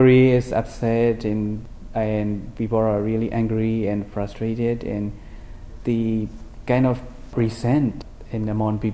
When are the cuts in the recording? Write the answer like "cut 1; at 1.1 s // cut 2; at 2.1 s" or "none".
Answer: cut 1; at 1.6 s